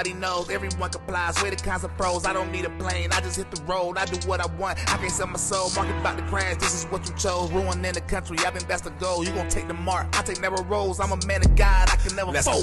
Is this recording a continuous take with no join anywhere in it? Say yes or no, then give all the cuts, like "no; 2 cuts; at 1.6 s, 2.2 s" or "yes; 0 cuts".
yes; 0 cuts